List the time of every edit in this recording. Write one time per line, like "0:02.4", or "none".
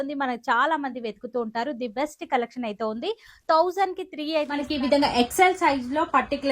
0:04.7

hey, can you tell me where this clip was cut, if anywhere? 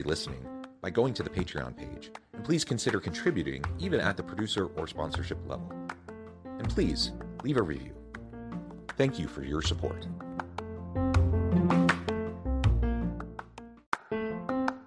0:13.7

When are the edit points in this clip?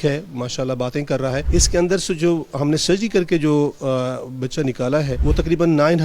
0:01.4
0:05.1

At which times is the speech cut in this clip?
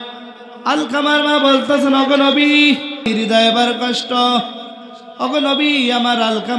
0:03.1

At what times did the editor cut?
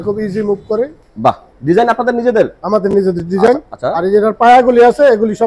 0:01.5

